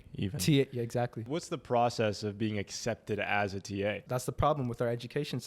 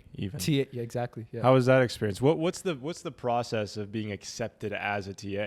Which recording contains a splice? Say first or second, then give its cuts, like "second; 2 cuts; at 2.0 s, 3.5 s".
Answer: first; 2 cuts; at 1.3 s, 4.0 s